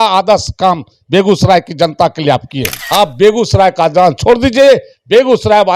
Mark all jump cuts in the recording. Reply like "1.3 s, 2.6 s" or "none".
2.8 s